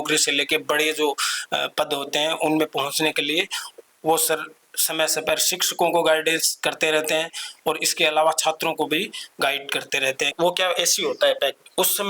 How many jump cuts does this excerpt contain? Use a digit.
1